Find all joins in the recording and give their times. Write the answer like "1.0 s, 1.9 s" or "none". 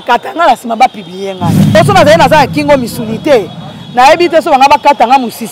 1.5 s